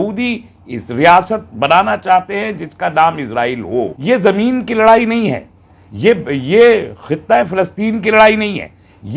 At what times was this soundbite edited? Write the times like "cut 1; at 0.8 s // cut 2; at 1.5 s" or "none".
cut 1; at 3.9 s